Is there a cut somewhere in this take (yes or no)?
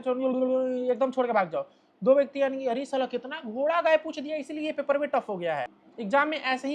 yes